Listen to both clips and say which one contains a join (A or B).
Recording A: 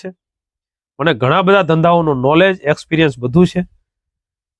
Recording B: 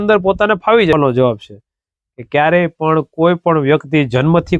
B